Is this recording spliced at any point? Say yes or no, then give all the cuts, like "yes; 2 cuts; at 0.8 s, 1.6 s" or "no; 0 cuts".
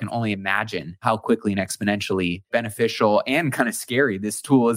yes; 2 cuts; at 1.0 s, 2.5 s